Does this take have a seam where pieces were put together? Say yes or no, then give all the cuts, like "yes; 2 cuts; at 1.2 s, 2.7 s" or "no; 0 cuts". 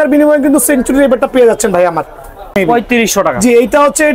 yes; 1 cut; at 2.5 s